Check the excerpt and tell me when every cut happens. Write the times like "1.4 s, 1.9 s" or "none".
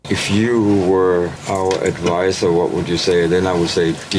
1.4 s